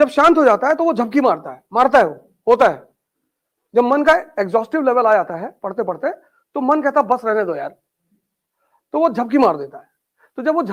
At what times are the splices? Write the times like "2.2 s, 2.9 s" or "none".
none

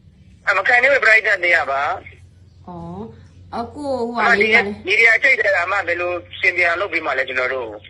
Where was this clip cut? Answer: none

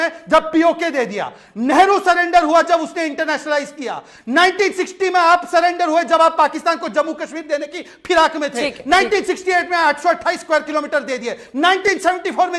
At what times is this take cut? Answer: none

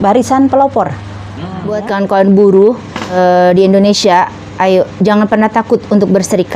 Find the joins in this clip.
1.7 s, 3.1 s

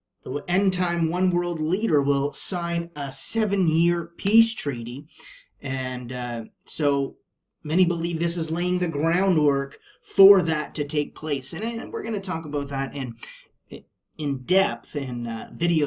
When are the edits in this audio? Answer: none

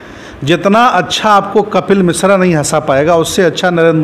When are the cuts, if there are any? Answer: none

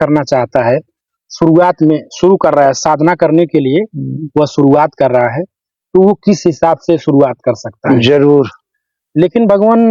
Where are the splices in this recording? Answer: 7.8 s

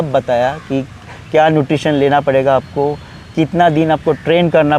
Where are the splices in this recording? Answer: none

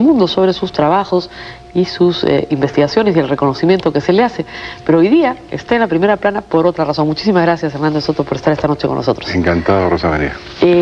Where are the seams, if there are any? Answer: 6.5 s

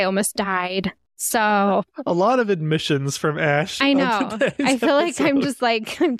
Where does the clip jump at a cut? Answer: none

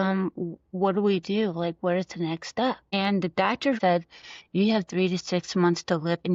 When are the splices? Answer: 2.8 s, 3.8 s

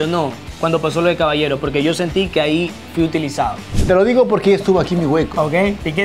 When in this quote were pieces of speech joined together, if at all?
3.7 s

